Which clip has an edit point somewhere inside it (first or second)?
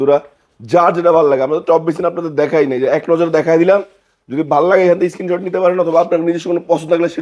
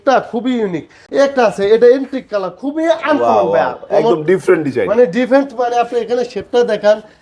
second